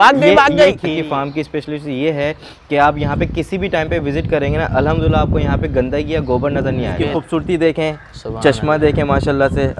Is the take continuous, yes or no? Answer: no